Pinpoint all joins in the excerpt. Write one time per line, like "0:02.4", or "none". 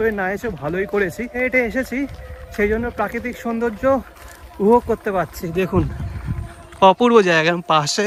none